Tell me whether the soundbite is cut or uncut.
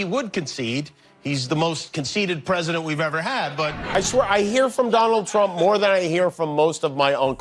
cut